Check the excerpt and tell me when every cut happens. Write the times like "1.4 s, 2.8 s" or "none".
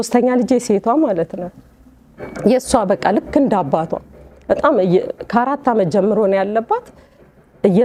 none